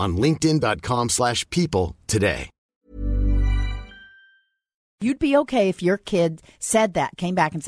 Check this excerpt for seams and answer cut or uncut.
cut